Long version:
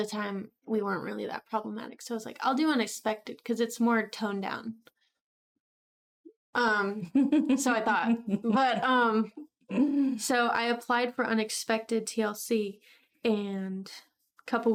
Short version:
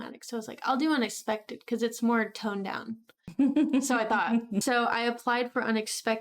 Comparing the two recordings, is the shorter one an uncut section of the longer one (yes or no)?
no